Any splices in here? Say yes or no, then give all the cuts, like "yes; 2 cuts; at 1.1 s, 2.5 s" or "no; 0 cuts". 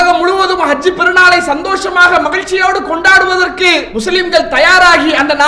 yes; 1 cut; at 3.9 s